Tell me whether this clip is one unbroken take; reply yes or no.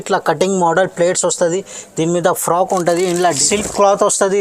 no